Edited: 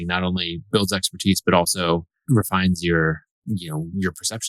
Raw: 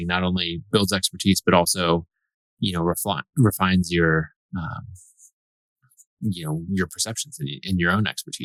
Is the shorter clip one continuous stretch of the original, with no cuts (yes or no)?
no